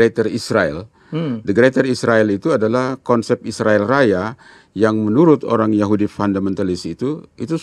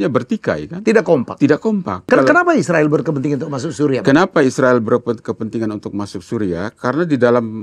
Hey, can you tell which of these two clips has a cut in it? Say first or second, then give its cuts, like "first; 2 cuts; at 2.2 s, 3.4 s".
second; 1 cut; at 2.1 s